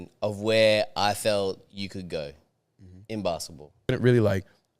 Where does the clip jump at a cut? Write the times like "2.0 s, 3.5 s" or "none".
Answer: 3.9 s